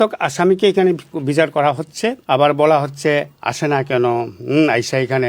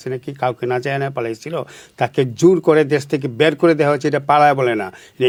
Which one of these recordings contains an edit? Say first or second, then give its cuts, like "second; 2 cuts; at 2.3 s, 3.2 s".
first; 2 cuts; at 1.1 s, 2.2 s